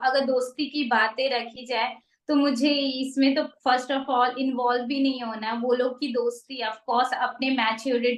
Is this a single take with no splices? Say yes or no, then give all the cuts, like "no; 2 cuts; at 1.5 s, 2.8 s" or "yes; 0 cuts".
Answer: yes; 0 cuts